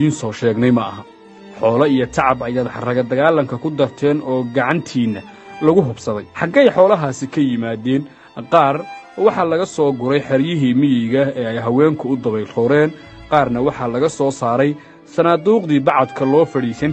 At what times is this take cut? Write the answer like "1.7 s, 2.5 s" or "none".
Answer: none